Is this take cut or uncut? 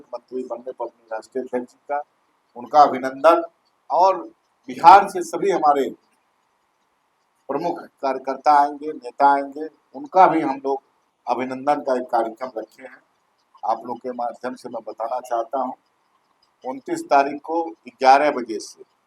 uncut